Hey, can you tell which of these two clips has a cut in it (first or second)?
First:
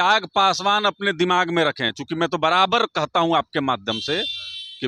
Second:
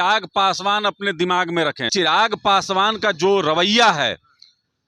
second